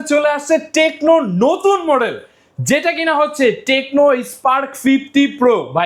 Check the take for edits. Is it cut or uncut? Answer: uncut